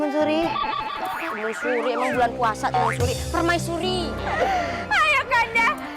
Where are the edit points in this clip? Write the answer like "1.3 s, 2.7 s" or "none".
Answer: 4.2 s